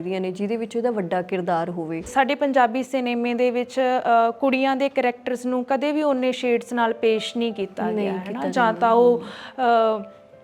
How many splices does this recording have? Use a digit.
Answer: 1